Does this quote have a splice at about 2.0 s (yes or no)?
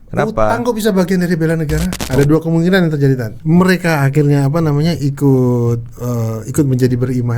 yes